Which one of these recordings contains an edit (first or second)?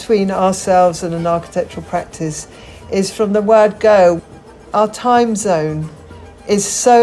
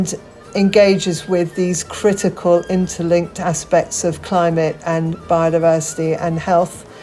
first